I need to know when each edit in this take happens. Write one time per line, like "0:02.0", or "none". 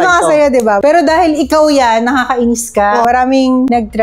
0:00.8
0:03.0